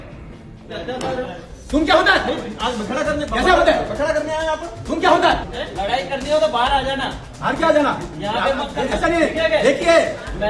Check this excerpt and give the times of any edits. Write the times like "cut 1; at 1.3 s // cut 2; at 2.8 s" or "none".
cut 1; at 5.5 s